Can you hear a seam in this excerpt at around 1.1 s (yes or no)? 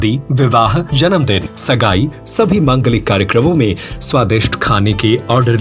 yes